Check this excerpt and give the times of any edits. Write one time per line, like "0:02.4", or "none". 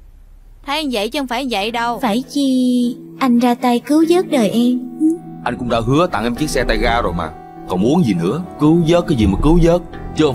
0:02.0
0:05.3
0:08.5